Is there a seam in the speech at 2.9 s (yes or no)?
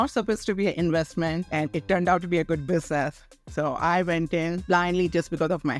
no